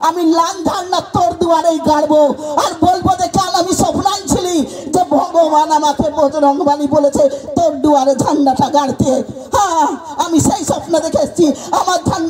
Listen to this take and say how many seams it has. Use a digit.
0